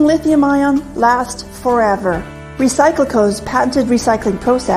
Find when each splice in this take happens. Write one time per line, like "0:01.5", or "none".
0:01.3